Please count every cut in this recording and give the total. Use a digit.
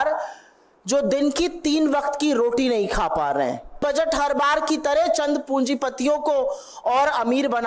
1